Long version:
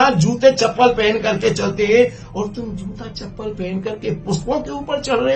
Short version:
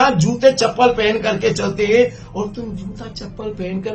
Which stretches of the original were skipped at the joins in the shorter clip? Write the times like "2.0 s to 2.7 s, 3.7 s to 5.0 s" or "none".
none